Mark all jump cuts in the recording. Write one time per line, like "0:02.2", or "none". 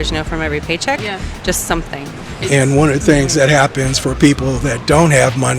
0:02.4